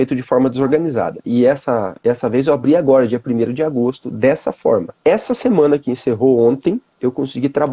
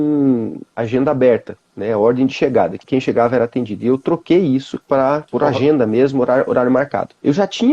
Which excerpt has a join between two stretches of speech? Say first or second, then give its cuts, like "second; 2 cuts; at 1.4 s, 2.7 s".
second; 1 cut; at 2.8 s